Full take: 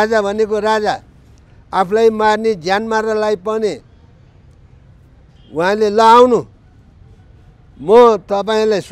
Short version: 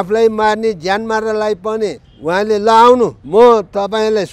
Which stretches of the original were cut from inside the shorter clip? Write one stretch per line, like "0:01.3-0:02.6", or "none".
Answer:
0:03.9-0:05.4
0:06.5-0:07.8